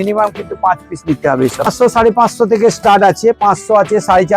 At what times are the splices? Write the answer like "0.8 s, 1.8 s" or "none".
1.7 s